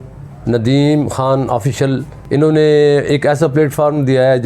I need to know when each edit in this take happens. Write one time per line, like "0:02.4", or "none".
0:02.1